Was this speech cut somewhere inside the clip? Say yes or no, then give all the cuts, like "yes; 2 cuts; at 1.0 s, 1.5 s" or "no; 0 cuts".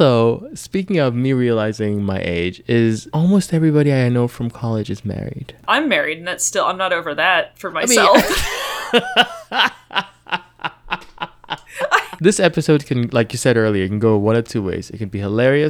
yes; 2 cuts; at 5.5 s, 12.1 s